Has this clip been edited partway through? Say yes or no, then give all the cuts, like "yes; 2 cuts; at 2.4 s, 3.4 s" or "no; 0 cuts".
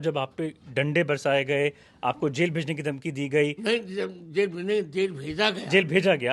no; 0 cuts